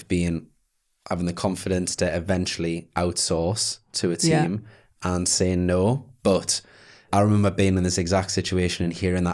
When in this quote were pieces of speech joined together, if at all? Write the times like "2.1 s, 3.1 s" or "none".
7.0 s